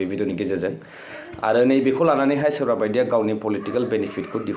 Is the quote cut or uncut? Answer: uncut